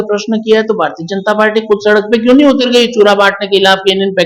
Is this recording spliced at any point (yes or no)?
no